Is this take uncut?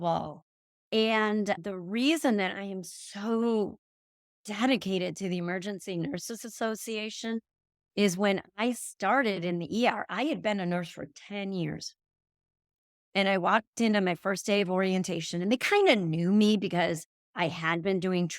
no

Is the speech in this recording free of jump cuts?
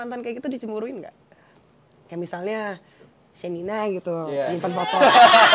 yes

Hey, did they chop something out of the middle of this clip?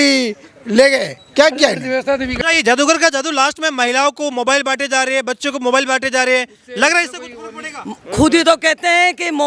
no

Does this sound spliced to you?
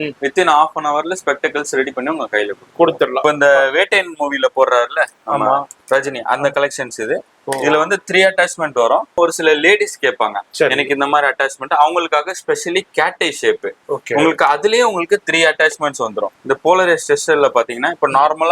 yes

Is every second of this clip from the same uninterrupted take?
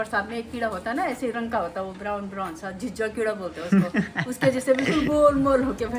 yes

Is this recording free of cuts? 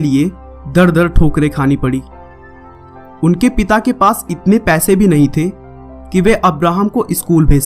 no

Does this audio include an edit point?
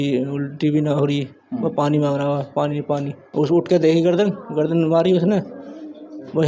yes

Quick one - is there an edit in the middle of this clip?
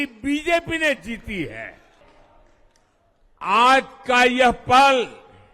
yes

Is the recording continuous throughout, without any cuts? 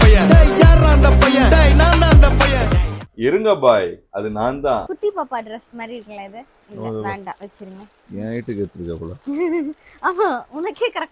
no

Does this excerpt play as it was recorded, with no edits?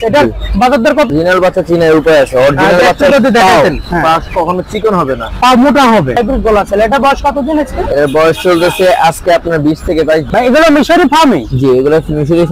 no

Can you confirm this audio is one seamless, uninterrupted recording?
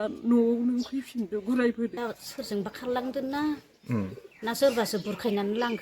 no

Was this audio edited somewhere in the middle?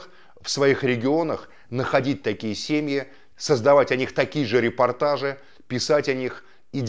no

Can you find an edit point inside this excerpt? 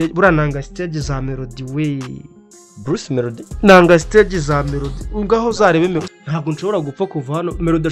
yes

